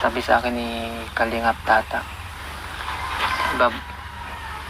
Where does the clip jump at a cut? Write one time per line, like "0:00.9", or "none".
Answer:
none